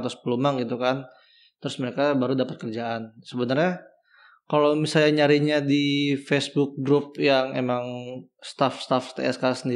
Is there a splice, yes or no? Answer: no